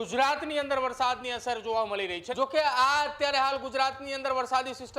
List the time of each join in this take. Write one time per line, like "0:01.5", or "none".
0:02.2